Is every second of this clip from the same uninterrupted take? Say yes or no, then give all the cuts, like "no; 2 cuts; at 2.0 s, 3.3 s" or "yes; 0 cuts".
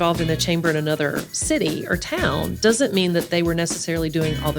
yes; 0 cuts